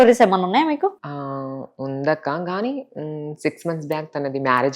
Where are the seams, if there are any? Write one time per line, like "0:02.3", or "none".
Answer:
none